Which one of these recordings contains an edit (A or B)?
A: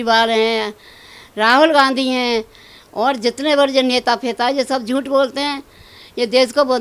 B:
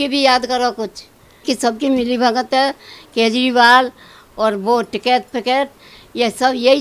B